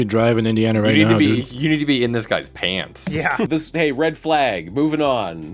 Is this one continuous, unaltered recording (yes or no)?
no